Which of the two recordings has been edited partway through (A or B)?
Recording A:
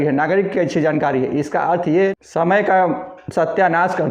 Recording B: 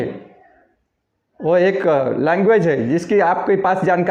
A